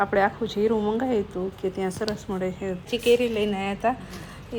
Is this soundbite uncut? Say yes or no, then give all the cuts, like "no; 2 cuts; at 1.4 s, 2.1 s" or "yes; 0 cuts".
no; 1 cut; at 2.9 s